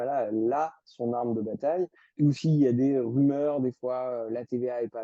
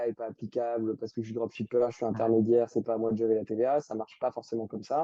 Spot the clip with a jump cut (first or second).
first